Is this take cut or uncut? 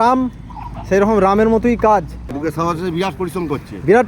cut